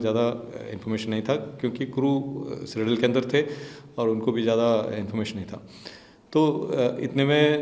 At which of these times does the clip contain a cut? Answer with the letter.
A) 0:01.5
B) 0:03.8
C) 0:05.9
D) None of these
D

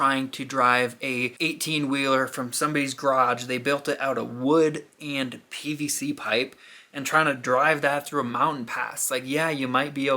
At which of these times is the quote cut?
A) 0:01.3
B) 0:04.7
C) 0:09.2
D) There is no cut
A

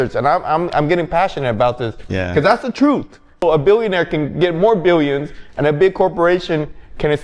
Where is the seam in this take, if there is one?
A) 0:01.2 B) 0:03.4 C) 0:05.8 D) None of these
B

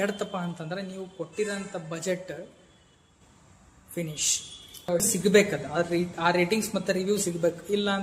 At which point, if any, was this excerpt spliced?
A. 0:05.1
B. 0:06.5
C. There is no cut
A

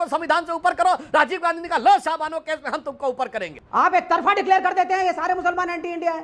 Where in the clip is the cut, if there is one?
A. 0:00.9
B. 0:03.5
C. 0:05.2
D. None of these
B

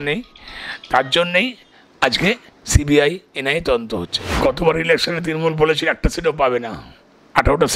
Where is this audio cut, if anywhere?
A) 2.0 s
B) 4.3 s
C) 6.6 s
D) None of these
B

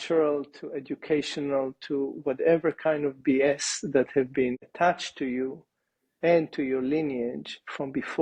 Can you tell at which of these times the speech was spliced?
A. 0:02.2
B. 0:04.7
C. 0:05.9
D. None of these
B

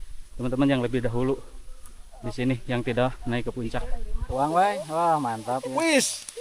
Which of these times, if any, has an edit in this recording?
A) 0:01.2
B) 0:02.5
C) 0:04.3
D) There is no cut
C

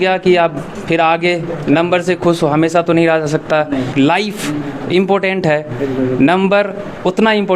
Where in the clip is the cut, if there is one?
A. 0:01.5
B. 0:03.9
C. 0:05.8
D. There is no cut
B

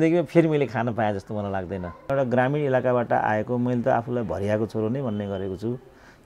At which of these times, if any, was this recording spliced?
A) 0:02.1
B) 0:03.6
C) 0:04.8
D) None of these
A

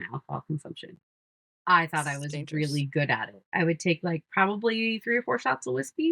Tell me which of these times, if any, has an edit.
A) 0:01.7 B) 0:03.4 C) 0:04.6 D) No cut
B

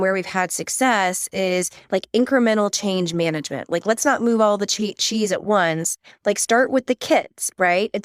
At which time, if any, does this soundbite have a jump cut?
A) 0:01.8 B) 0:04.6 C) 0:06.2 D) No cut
D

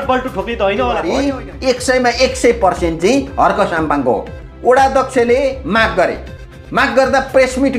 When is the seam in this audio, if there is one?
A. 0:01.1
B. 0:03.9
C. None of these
A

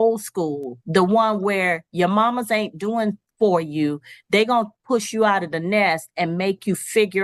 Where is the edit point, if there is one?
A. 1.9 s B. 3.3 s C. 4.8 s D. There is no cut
D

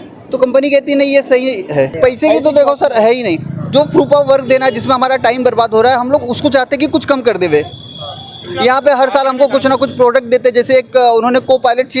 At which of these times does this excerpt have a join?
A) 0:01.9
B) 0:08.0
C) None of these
A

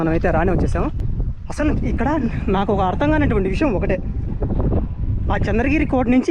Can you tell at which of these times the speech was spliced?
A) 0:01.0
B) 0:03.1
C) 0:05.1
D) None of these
A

